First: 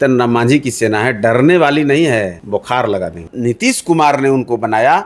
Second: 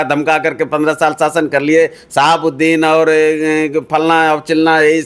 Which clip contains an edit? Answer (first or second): first